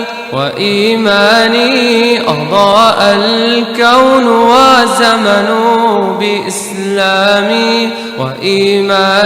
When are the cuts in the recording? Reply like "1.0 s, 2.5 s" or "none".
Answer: none